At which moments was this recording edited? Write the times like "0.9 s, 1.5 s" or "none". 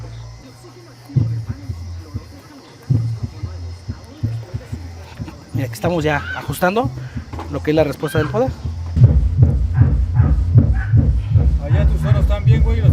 8.9 s